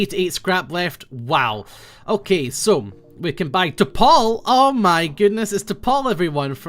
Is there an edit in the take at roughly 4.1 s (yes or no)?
yes